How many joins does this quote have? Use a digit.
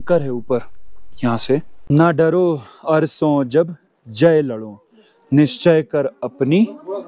1